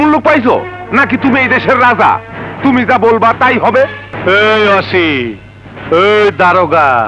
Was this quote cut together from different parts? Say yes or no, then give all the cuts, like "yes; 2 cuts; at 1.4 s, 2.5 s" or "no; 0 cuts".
yes; 1 cut; at 4.1 s